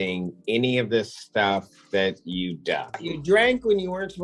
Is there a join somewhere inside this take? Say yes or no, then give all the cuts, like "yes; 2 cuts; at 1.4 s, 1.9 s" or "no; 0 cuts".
yes; 1 cut; at 3.1 s